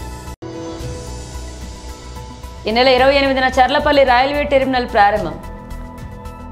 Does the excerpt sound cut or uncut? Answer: cut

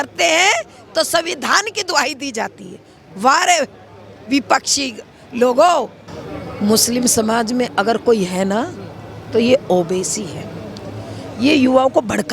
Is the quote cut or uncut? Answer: cut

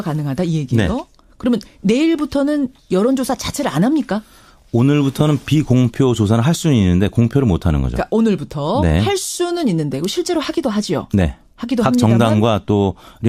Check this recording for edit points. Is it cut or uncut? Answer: cut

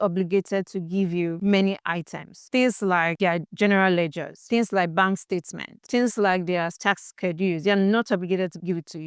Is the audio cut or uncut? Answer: uncut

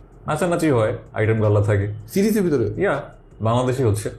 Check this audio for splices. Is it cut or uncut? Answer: uncut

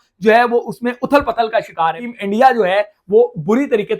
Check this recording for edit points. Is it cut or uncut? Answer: cut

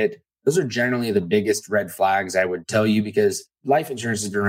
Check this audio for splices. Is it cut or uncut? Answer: cut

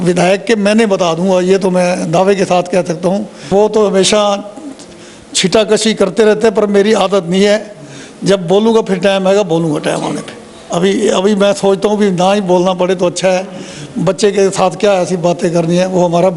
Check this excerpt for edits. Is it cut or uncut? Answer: cut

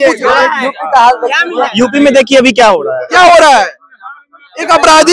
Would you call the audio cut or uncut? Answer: uncut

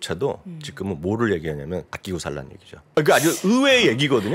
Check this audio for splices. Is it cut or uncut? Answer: cut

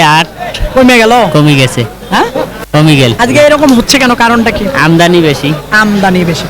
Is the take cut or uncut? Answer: uncut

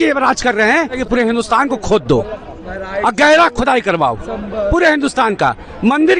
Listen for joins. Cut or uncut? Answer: cut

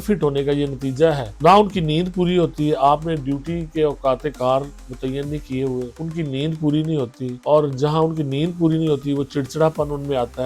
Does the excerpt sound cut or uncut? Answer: cut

